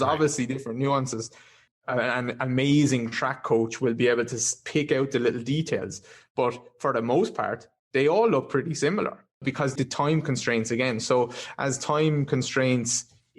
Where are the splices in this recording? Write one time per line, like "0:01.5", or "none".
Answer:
0:01.6
0:09.7